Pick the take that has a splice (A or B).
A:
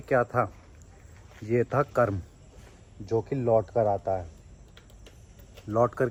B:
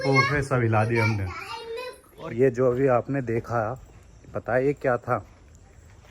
B